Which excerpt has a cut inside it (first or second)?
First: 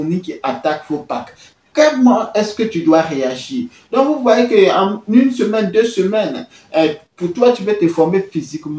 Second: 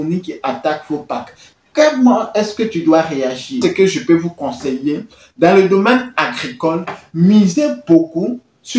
second